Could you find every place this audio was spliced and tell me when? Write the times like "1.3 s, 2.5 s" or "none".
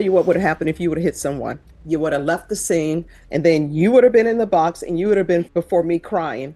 1.7 s, 3.2 s, 5.5 s

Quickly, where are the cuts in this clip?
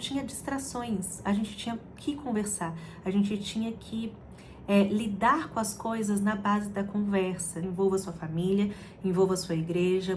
7.6 s

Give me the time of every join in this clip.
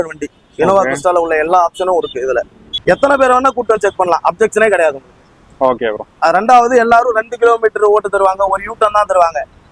2.7 s

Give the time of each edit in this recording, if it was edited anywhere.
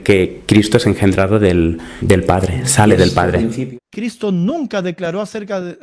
3.6 s

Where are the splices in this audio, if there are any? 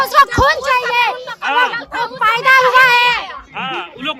none

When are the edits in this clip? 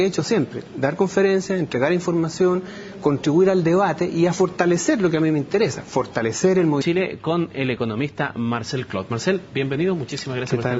none

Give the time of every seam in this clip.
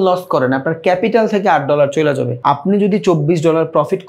2.3 s

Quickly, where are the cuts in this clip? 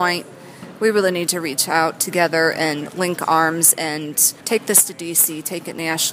4.3 s

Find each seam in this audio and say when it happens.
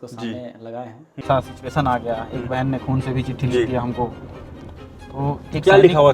1.2 s

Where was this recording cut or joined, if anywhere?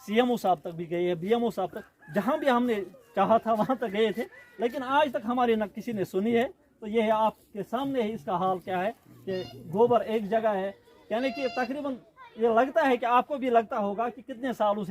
none

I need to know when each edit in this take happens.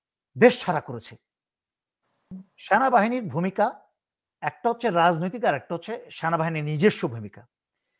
2.3 s

